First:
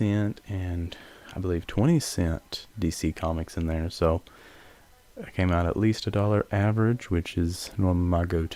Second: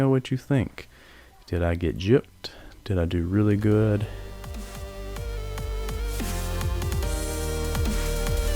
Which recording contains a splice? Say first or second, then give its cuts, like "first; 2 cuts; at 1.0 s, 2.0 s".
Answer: second; 1 cut; at 4.2 s